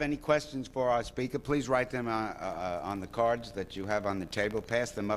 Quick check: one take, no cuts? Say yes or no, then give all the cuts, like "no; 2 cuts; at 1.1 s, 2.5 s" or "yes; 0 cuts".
yes; 0 cuts